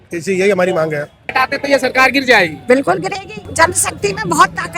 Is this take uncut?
no; 2 cuts; at 1.3 s, 3.4 s

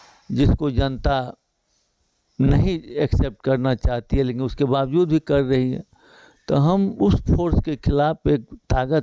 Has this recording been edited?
no; 0 cuts

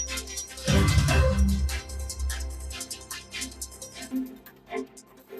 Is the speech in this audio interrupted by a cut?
yes; 1 cut; at 1.5 s

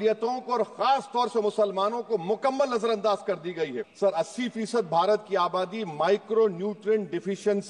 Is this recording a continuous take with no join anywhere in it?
no; 1 cut; at 3.8 s

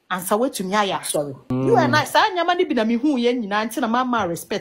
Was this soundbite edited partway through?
yes; 1 cut; at 1.4 s

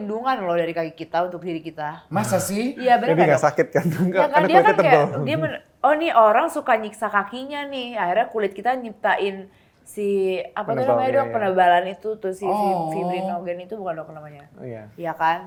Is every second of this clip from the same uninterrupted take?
yes; 0 cuts

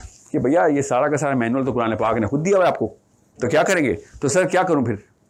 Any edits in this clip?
no; 0 cuts

